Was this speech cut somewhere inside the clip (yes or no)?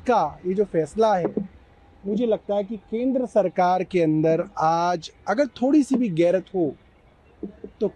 no